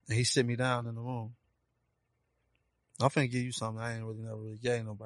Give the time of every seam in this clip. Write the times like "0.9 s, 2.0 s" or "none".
none